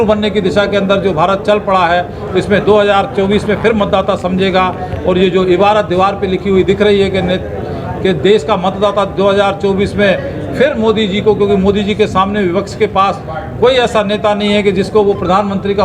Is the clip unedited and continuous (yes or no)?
yes